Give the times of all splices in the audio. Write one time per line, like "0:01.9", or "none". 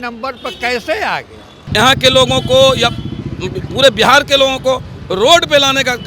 0:01.6